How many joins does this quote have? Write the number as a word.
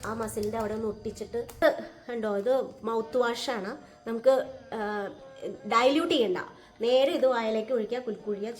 one